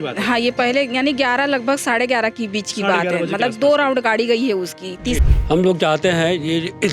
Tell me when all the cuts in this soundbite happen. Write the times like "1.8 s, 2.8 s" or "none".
5.2 s